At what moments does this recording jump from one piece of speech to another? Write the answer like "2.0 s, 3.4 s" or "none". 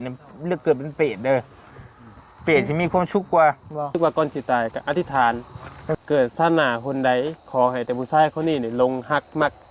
3.9 s